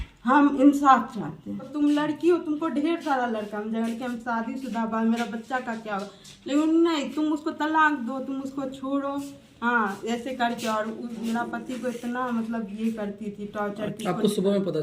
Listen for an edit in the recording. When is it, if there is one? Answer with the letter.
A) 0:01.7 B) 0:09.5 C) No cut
A